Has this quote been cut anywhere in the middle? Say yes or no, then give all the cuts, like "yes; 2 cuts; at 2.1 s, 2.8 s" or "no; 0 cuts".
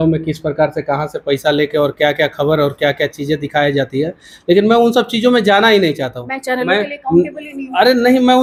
no; 0 cuts